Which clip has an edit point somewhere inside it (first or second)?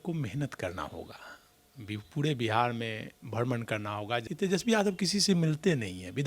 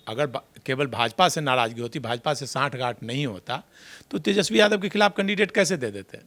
first